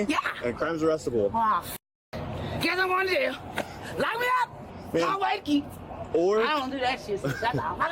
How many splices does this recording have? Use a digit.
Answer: 1